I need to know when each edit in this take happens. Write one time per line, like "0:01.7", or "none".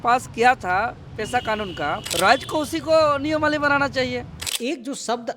0:02.1
0:04.4